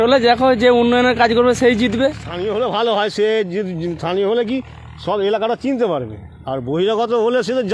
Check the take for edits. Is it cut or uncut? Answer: cut